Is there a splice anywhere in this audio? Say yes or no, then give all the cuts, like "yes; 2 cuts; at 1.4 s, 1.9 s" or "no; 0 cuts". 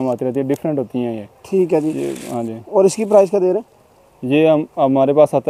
no; 0 cuts